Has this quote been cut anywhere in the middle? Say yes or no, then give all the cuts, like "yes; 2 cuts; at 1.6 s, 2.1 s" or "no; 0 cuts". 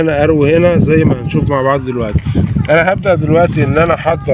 no; 0 cuts